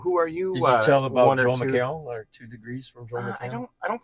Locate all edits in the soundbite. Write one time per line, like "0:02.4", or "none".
none